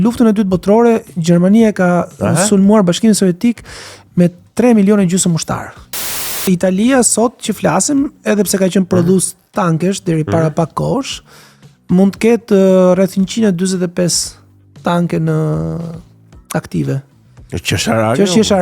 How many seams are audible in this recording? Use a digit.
1